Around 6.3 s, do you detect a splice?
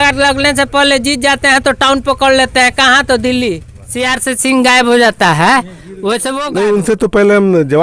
yes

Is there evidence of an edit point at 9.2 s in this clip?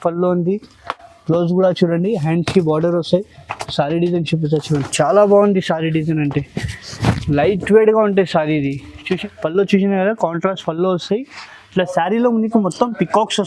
yes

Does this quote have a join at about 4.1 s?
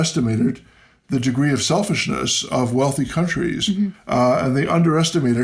no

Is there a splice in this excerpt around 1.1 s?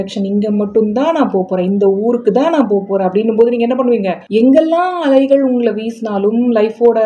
no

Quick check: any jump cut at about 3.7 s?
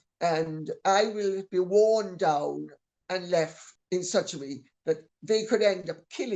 yes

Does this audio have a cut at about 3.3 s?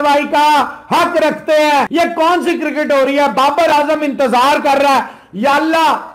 no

